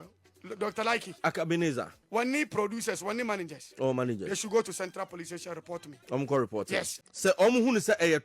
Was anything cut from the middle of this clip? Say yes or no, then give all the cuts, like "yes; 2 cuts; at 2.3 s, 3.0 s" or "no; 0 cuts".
yes; 1 cut; at 7.0 s